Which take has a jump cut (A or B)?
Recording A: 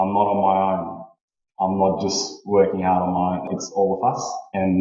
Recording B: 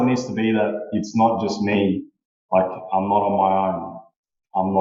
A